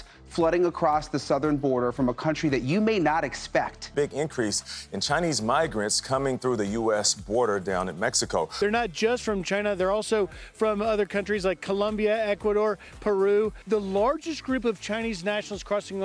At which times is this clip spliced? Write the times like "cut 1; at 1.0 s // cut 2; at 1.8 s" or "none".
none